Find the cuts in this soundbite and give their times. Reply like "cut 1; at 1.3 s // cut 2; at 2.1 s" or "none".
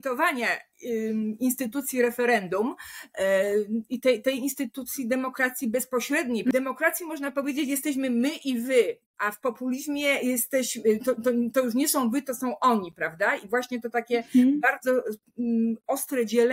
cut 1; at 6.5 s